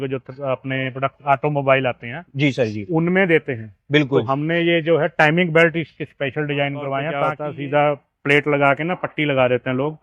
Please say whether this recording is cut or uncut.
cut